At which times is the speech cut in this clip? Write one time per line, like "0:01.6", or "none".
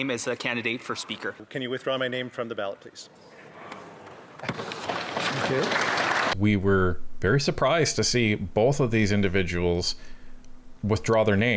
0:01.4
0:06.3